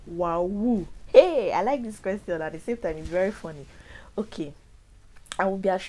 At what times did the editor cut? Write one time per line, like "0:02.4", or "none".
none